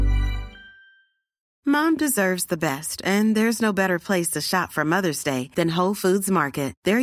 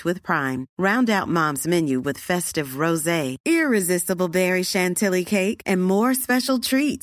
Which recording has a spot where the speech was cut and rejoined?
first; 1 cut; at 1.5 s

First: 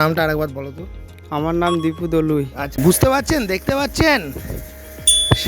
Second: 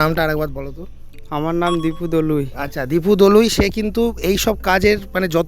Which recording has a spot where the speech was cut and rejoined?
first; 1 cut; at 2.7 s

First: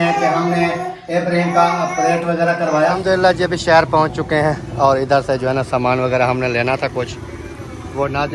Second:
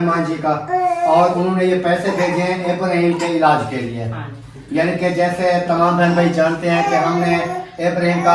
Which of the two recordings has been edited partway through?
first; 1 cut; at 2.9 s

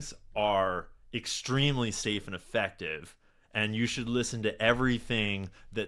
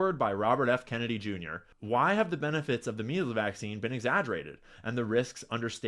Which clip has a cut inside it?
second; 1 cut; at 1.7 s

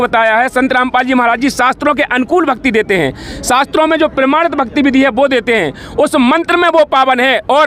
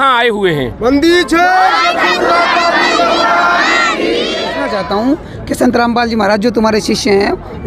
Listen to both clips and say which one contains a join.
second; 1 cut; at 4.5 s

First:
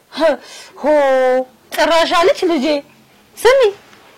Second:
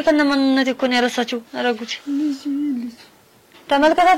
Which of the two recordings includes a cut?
second; 1 cut; at 1.5 s

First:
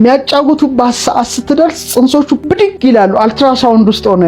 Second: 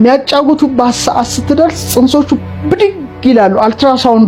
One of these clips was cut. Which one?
first; 1 cut; at 2.6 s

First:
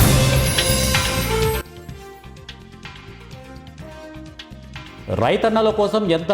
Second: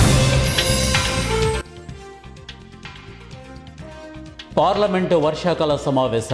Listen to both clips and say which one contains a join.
first; 1 cut; at 4.5 s

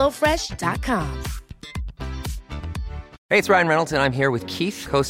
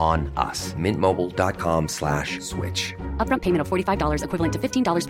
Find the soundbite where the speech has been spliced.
first; 1 cut; at 3.2 s

